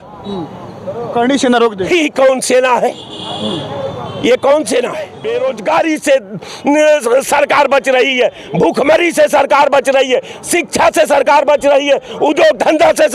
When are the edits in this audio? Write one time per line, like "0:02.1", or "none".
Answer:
0:05.2